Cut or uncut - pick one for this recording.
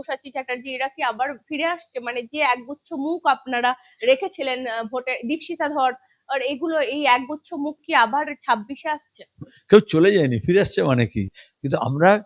uncut